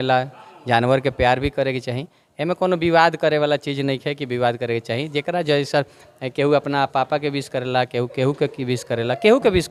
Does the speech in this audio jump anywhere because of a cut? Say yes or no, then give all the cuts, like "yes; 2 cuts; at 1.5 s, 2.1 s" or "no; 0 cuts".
no; 0 cuts